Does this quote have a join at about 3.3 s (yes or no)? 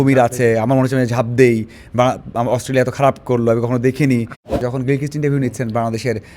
no